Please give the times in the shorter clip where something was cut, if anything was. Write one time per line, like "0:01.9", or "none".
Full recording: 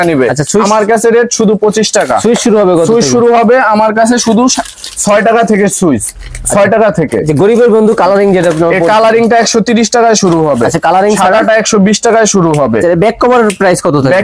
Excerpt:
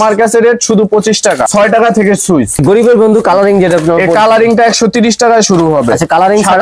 0:01.4
0:02.6

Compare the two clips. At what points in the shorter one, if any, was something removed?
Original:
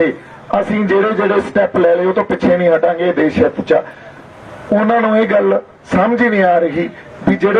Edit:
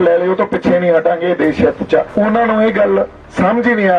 0:02.1

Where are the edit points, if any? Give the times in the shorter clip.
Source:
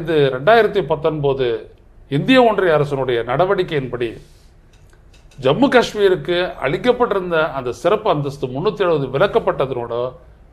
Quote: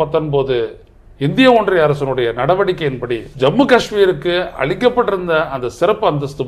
0:03.3

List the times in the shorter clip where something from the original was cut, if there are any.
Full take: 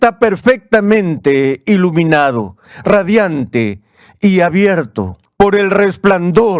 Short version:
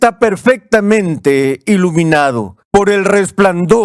0:02.5

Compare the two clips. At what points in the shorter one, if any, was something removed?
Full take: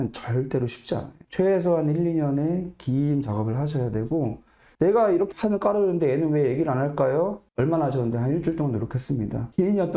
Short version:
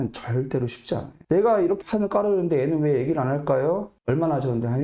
0:01.1

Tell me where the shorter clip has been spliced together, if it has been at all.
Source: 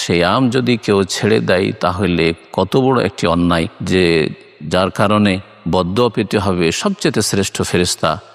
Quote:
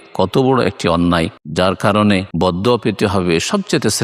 0:01.4
0:02.3

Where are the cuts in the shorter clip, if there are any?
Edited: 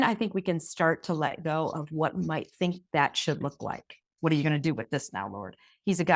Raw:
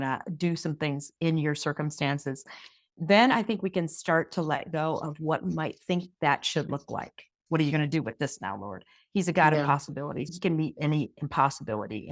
none

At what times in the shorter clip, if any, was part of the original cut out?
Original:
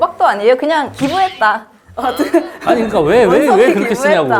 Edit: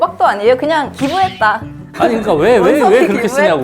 0:01.9

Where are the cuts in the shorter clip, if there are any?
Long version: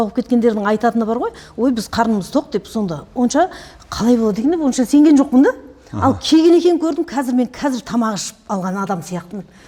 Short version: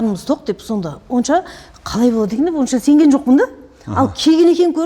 none

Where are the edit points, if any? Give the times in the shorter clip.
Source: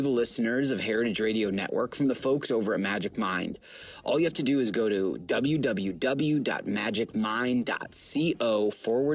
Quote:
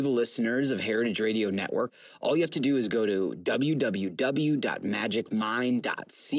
0:01.9

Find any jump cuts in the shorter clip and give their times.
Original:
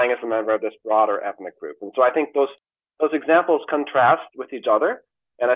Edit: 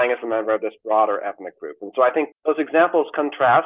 0:02.3

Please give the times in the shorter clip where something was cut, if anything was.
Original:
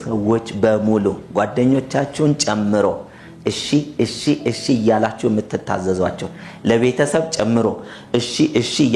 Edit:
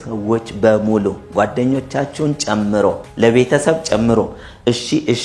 0:03.1

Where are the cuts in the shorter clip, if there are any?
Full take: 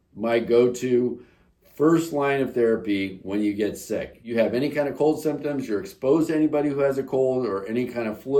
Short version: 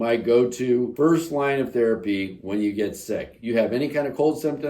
0:00.9

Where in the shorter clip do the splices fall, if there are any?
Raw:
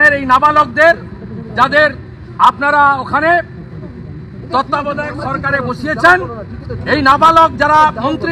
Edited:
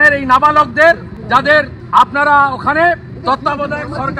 0:01.5
0:03.1

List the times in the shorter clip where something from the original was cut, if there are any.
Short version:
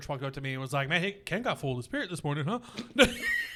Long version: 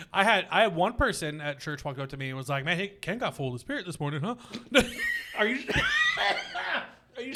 none

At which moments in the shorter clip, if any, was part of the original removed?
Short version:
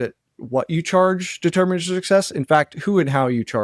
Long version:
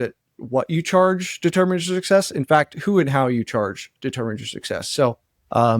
none

